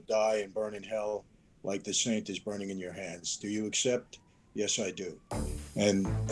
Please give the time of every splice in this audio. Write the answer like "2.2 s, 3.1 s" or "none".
none

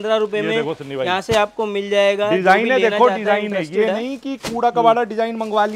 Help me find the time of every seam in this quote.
none

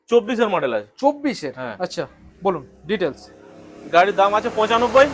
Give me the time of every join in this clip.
none

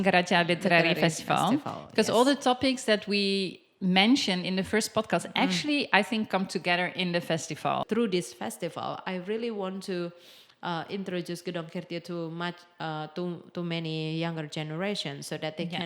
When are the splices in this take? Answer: 7.8 s

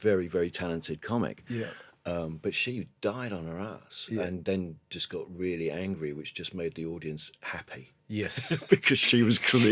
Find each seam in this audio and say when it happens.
none

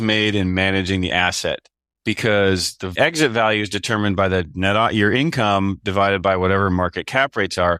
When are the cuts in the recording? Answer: 2.9 s

